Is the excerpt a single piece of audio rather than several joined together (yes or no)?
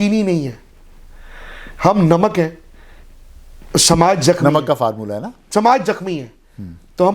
yes